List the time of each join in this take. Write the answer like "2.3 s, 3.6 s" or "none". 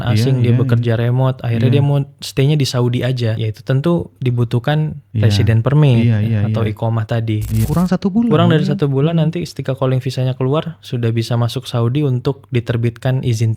3.4 s, 5.0 s, 7.6 s